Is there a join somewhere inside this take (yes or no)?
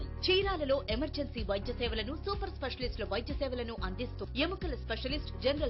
no